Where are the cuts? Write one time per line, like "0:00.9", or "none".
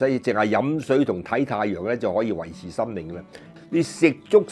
0:03.6

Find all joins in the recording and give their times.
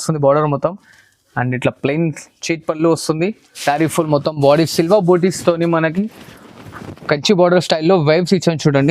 0:03.5

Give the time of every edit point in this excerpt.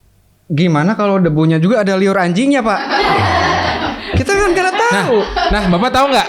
none

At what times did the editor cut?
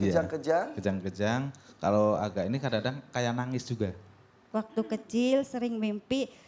0:04.5

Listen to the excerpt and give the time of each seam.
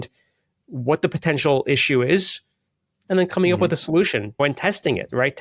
0:04.4

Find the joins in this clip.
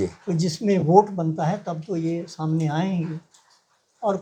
none

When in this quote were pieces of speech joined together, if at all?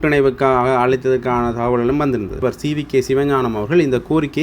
0:02.4

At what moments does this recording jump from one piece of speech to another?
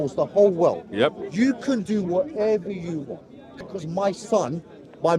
0:03.6

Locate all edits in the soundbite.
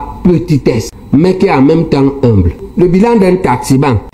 0:00.9
0:02.7

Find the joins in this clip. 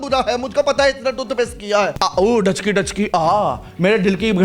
0:01.9

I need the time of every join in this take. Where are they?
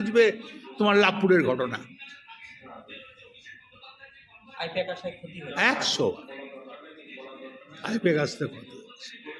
none

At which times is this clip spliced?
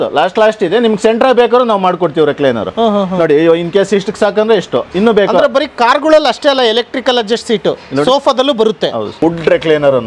0:09.1

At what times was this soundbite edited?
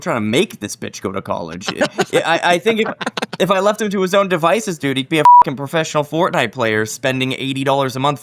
none

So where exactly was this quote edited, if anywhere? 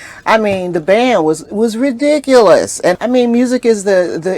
0:03.0

